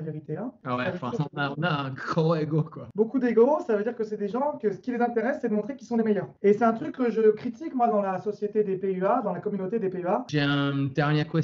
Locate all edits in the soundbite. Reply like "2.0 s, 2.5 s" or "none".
2.9 s, 10.3 s